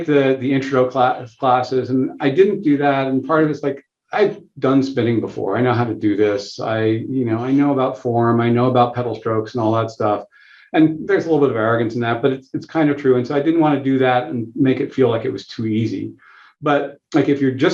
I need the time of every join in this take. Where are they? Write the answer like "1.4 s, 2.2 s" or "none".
none